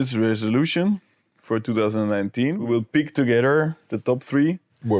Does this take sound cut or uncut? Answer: cut